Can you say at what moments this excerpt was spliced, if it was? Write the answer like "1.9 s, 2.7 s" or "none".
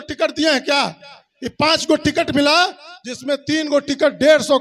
none